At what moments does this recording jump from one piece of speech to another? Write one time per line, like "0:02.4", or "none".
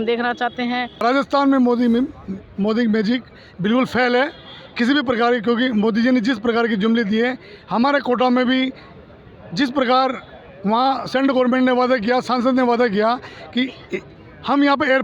0:01.0